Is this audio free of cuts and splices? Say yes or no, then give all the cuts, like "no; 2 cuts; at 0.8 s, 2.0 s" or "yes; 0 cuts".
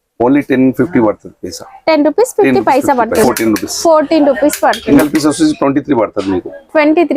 no; 2 cuts; at 3.3 s, 4.8 s